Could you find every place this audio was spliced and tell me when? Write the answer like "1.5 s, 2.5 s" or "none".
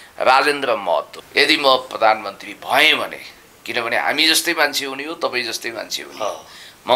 1.2 s